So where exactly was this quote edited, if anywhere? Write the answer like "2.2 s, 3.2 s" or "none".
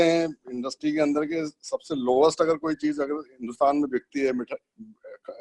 none